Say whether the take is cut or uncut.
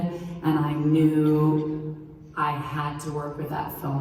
uncut